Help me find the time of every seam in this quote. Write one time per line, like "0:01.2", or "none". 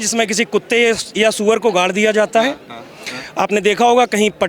none